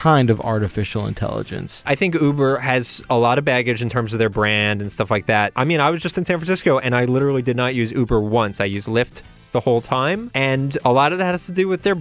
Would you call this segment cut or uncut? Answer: cut